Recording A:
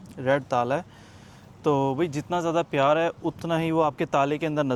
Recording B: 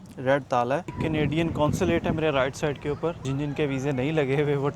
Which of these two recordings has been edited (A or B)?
B